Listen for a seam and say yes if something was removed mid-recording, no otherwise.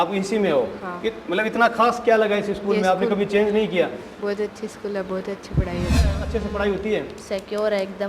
yes